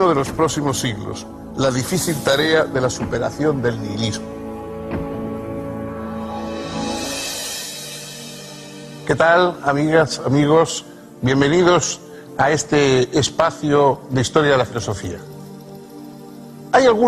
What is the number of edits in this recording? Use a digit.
1